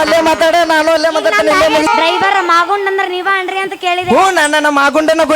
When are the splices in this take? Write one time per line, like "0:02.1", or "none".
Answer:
0:01.9

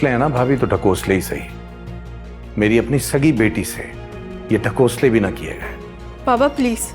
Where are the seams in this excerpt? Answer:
none

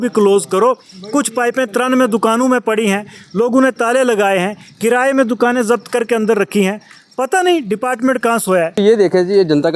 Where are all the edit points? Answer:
0:08.8

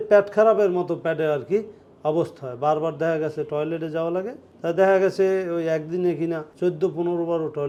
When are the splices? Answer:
none

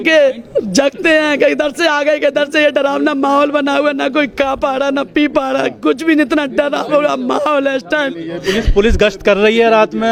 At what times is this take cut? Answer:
none

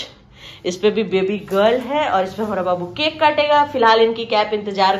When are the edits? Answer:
none

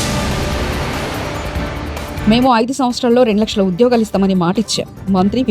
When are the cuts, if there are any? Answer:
none

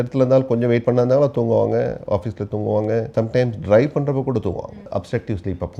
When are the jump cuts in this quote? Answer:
0:03.1
0:04.9

